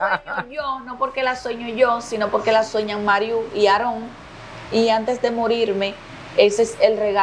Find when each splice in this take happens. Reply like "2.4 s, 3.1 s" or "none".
none